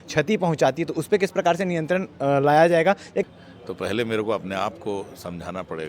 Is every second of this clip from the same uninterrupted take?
no; 1 cut; at 3.2 s

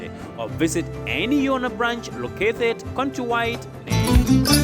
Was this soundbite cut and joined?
yes; 1 cut; at 3.8 s

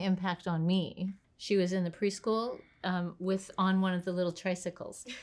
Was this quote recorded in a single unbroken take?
no; 1 cut; at 1.2 s

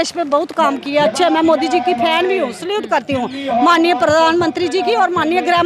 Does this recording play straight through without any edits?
yes; 0 cuts

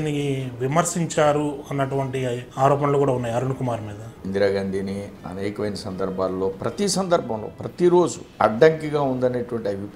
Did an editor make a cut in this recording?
yes; 3 cuts; at 2.4 s, 4.1 s, 8.2 s

